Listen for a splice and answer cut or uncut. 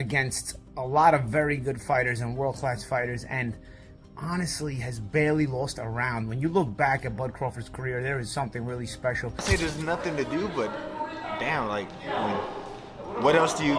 cut